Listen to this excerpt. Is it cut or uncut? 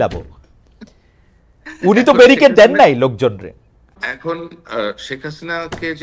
cut